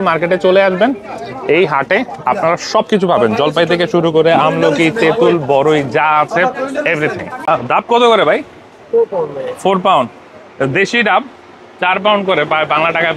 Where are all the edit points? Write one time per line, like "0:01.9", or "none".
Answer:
0:07.5